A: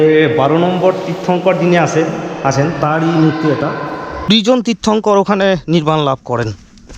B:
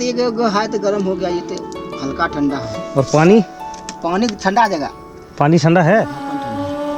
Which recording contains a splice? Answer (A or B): A